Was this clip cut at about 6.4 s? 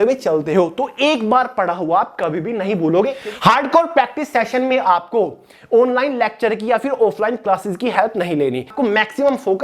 no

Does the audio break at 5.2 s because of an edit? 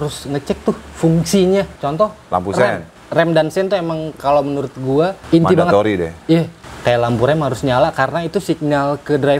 yes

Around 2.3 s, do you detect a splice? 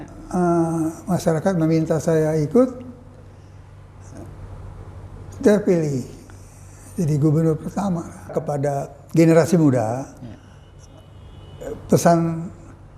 no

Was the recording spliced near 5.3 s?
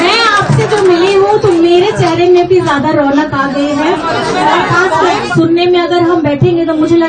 yes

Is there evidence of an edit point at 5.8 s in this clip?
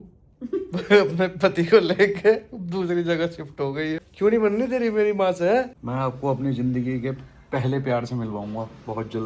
yes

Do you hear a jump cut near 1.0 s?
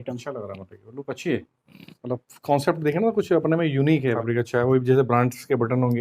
no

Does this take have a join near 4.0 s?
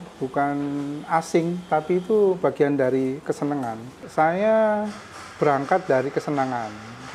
yes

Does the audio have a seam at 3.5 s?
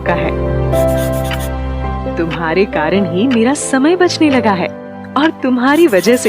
no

